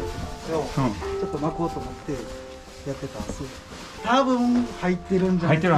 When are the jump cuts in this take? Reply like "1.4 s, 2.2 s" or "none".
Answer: 3.8 s